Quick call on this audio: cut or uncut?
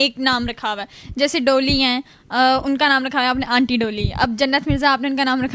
uncut